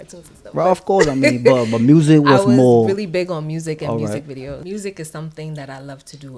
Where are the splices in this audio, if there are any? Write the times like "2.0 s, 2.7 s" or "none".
4.6 s

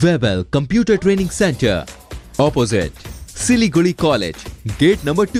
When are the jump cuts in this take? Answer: none

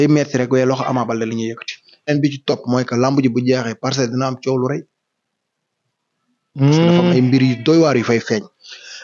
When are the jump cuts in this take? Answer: 2.1 s

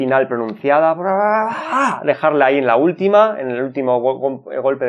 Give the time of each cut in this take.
none

